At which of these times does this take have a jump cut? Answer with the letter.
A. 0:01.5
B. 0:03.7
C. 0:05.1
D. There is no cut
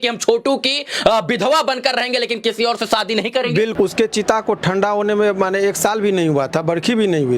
B